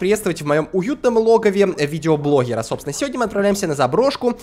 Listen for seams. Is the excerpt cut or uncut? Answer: uncut